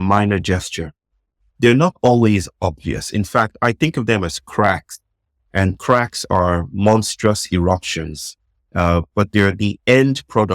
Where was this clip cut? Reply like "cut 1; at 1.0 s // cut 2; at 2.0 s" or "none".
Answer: cut 1; at 1.4 s